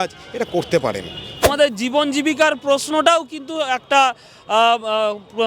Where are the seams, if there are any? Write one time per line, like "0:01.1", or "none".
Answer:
0:01.5